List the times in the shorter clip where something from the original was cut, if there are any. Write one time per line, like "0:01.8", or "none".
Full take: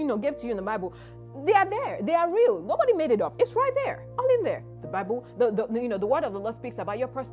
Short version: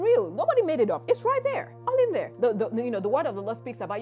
0:02.3